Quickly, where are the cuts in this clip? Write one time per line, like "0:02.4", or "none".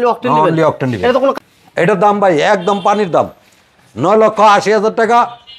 0:01.4